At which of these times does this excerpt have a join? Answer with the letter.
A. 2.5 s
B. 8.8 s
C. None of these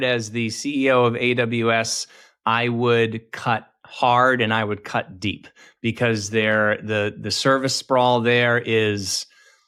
C